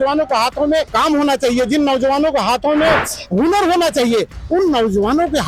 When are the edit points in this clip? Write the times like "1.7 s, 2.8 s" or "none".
0.9 s